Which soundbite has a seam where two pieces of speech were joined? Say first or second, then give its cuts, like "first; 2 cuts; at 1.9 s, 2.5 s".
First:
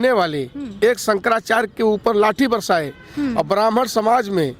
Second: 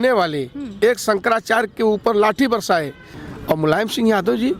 second; 1 cut; at 3.0 s